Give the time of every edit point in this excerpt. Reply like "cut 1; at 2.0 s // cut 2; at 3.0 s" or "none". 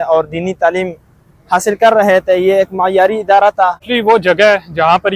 cut 1; at 3.9 s

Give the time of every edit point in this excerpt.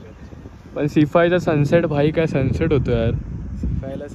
none

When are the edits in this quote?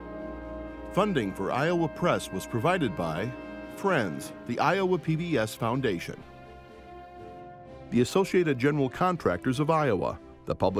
cut 1; at 0.9 s // cut 2; at 6.2 s // cut 3; at 7.9 s

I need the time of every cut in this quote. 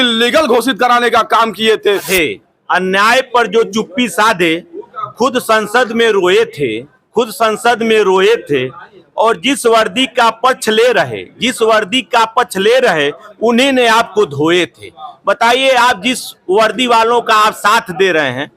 cut 1; at 2.1 s

